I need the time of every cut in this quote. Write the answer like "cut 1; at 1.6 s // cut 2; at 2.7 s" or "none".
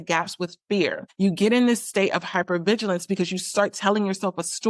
cut 1; at 1.0 s